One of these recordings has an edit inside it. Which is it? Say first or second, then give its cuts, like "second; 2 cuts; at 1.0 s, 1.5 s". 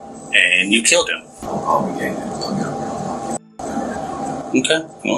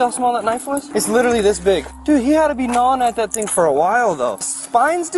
first; 1 cut; at 1.3 s